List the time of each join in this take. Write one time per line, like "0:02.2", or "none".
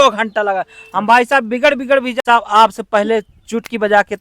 0:02.2